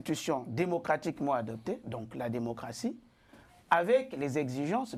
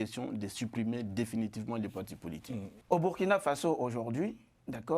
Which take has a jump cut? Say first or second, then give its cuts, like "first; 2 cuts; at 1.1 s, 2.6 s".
second; 1 cut; at 2.7 s